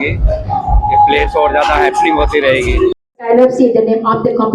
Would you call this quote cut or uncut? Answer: cut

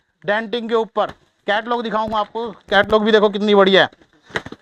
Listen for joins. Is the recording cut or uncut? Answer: uncut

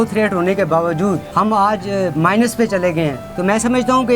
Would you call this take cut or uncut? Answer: cut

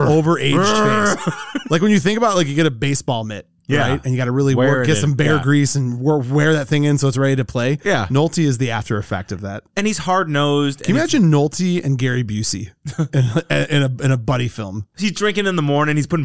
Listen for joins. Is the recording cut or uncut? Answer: cut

